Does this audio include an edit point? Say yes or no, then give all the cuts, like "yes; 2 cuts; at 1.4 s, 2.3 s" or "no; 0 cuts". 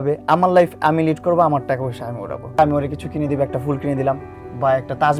yes; 1 cut; at 2.6 s